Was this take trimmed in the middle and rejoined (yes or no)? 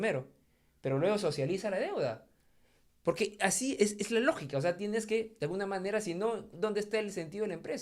no